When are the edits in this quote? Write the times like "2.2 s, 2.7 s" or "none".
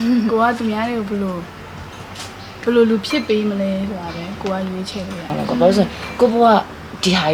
5.4 s